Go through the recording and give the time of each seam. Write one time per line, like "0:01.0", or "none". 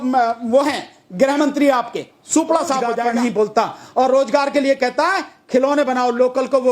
0:03.0